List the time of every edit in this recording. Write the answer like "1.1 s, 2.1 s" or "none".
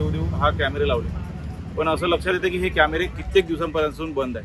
none